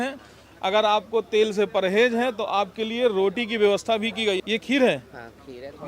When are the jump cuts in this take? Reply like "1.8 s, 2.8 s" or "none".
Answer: 4.4 s

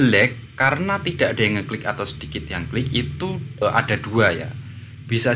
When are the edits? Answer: 3.6 s

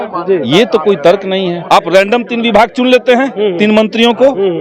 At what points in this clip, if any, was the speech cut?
1.6 s

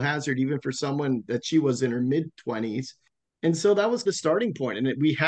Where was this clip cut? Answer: 3.0 s

